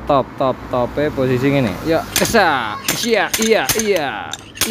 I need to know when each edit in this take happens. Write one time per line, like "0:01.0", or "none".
none

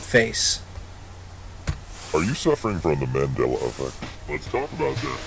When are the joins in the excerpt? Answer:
0:03.7

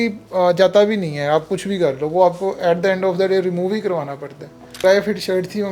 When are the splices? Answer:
0:04.8

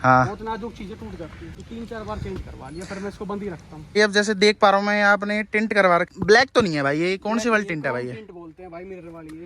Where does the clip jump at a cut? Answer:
0:01.6
0:04.0
0:06.1

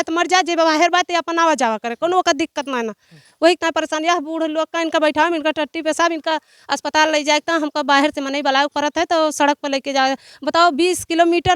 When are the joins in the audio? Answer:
none

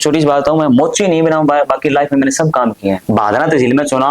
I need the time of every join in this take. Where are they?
0:03.0

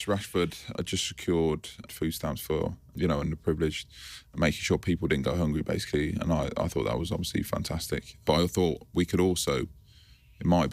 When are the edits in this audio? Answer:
0:00.7
0:01.9
0:02.9
0:08.2

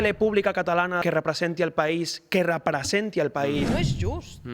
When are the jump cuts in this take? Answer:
0:01.0
0:03.8

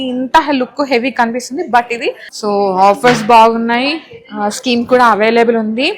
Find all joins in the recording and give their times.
0:02.3

